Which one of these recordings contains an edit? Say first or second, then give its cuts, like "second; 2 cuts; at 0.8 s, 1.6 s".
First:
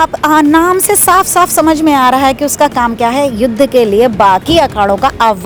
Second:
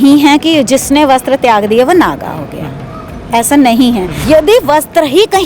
second; 1 cut; at 4.1 s